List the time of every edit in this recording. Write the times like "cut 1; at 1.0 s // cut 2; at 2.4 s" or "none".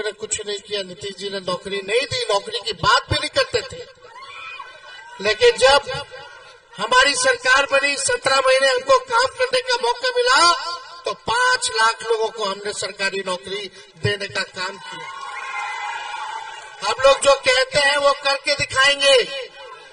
none

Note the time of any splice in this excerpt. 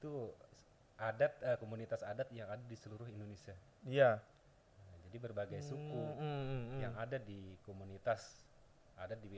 none

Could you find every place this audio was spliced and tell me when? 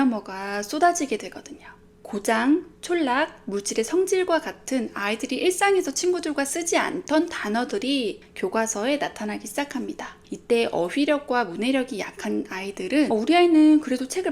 cut 1; at 13.1 s

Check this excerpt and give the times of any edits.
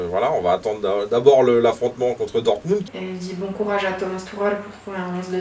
cut 1; at 2.8 s

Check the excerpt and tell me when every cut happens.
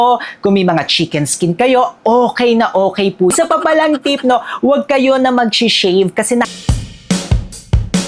cut 1; at 3.3 s // cut 2; at 6.5 s

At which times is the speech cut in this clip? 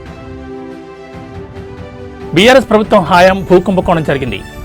none

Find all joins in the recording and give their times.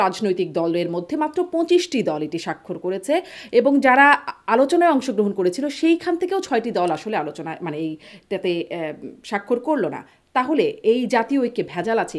none

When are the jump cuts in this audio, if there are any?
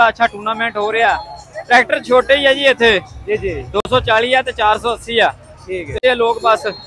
cut 1; at 6.0 s

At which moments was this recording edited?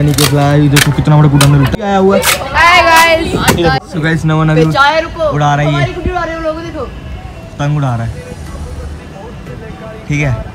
cut 1; at 1.7 s // cut 2; at 3.9 s // cut 3; at 7.5 s

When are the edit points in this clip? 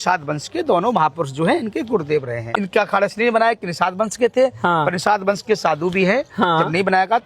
cut 1; at 2.5 s

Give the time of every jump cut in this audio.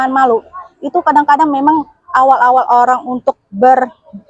none

